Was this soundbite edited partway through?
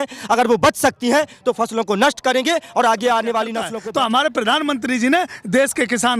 yes; 1 cut; at 3.6 s

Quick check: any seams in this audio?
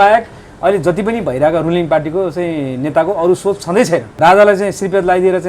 yes; 1 cut; at 4.1 s

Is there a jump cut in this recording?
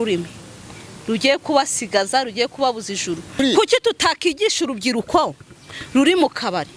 yes; 1 cut; at 3.3 s

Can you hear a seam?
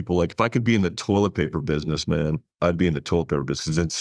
no; 0 cuts

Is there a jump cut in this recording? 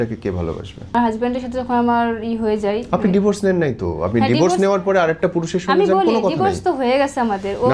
yes; 1 cut; at 0.9 s

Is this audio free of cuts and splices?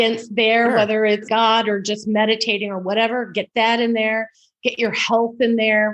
no; 1 cut; at 1.2 s

